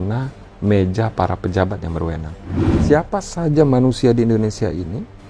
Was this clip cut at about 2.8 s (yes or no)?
yes